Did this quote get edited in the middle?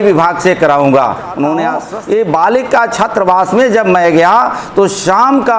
yes; 1 cut; at 1.8 s

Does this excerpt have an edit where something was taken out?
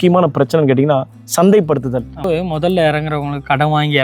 yes; 1 cut; at 2.3 s

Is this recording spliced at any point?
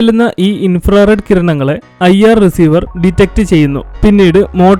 no; 0 cuts

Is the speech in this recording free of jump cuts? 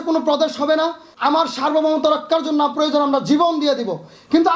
no; 1 cut; at 1.1 s

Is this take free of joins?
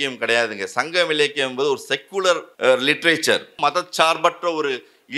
no; 2 cuts; at 2.5 s, 3.5 s

